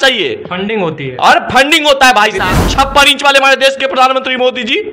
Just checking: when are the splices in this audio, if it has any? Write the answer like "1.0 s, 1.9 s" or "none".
2.6 s

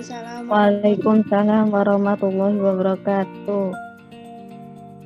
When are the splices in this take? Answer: 3.7 s

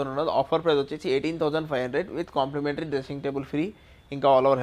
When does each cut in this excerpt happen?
none

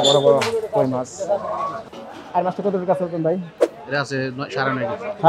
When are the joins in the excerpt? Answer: 1.9 s

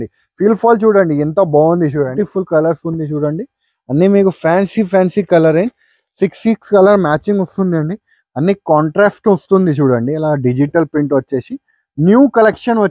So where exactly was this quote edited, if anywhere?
2.1 s

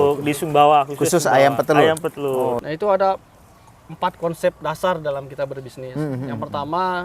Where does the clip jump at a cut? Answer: 2.6 s

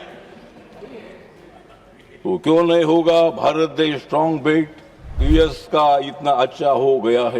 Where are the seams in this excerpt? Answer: 5.2 s

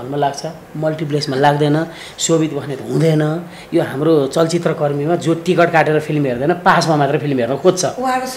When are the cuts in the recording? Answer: none

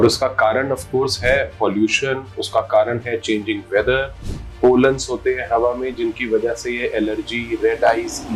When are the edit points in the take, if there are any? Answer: none

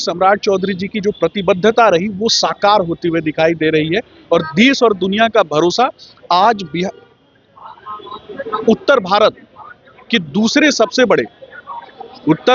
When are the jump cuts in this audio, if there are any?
none

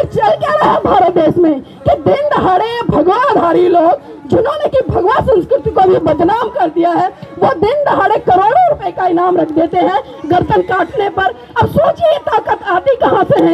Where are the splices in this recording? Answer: none

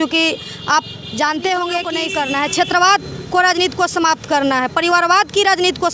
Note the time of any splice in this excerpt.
2.0 s

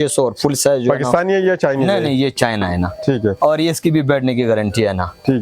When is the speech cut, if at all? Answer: none

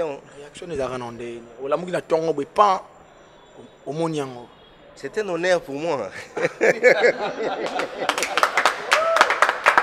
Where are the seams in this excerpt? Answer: none

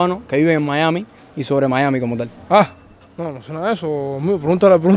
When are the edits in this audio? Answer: none

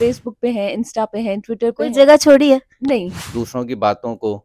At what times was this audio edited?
3.2 s

